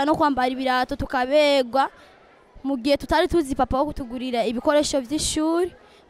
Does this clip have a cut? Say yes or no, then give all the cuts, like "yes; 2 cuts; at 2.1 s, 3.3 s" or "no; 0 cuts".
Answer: no; 0 cuts